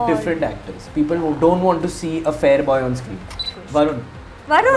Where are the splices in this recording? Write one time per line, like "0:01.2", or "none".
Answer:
0:03.4